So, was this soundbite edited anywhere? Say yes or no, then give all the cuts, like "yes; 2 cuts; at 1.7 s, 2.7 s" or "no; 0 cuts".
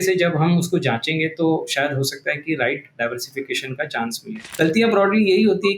yes; 1 cut; at 4.4 s